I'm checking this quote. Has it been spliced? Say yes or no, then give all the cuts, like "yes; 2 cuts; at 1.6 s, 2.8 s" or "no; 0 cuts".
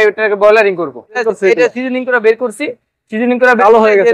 yes; 1 cut; at 1.3 s